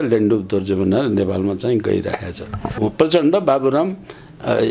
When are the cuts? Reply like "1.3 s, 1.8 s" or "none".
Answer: 2.7 s